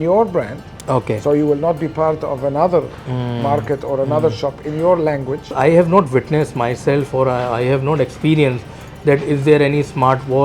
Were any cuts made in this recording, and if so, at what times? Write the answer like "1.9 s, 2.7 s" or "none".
5.5 s